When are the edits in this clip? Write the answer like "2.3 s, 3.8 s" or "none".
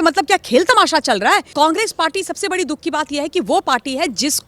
1.5 s